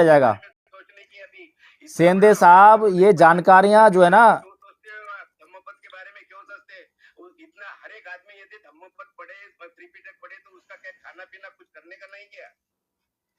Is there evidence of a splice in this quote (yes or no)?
no